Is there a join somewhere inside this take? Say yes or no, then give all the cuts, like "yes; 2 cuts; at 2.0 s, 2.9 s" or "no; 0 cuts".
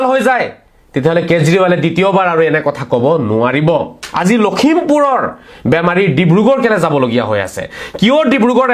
yes; 1 cut; at 4.0 s